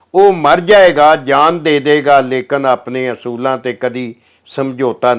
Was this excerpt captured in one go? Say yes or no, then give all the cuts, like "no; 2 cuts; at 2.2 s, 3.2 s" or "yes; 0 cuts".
yes; 0 cuts